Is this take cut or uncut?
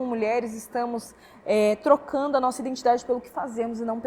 uncut